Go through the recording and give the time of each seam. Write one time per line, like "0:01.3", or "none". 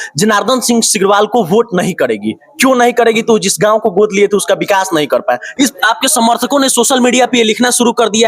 0:05.7